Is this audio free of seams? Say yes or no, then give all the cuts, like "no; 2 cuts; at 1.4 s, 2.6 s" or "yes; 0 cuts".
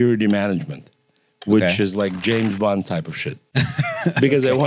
no; 1 cut; at 3.5 s